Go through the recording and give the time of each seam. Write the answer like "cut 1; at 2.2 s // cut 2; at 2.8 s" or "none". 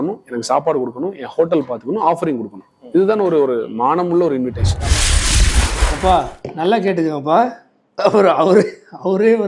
cut 1; at 2.6 s